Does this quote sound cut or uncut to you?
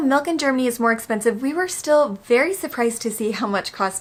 uncut